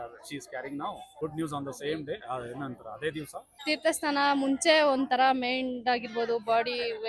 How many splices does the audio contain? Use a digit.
2